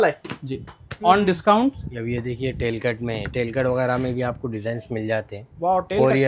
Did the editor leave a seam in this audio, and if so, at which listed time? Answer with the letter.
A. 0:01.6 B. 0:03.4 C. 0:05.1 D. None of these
A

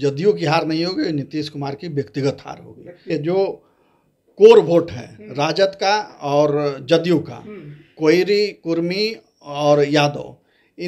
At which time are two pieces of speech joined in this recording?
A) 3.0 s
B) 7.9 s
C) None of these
A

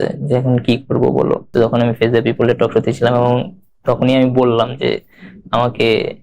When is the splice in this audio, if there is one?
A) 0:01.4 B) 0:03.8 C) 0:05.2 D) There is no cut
A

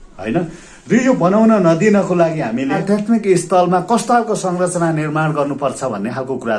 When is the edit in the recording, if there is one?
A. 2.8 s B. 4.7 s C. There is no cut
A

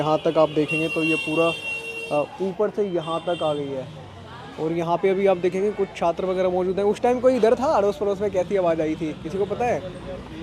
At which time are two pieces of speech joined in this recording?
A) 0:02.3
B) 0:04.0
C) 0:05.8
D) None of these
D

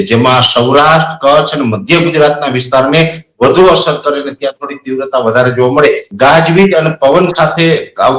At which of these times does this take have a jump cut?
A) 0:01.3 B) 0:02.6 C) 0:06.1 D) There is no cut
C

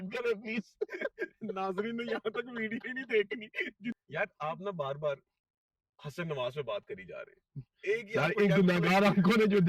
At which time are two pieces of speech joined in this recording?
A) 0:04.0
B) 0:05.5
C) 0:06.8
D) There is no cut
A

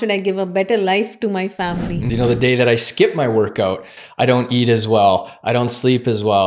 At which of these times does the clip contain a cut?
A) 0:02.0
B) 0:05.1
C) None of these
A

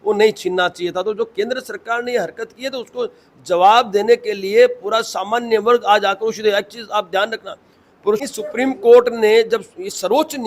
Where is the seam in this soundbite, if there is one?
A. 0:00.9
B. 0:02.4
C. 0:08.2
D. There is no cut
C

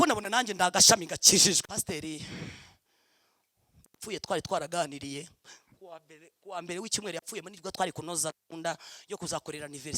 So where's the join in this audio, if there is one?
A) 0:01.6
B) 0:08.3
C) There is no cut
A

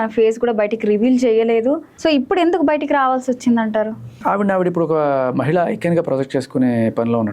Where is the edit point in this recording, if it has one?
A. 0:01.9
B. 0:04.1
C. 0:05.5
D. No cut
A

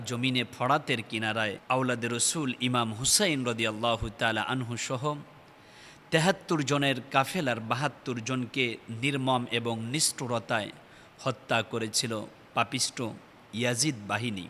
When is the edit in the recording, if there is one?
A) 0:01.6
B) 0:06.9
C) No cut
A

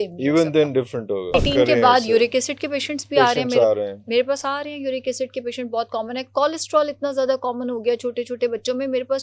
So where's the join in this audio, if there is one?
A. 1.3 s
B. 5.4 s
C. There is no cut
A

